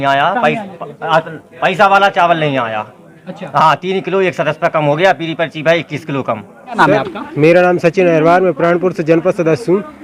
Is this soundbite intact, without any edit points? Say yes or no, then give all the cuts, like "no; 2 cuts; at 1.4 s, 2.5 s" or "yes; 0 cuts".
no; 1 cut; at 6.8 s